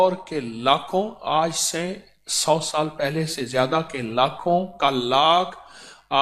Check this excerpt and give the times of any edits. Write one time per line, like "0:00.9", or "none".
none